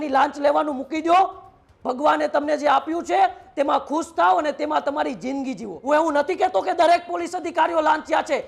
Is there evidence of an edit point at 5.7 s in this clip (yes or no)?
yes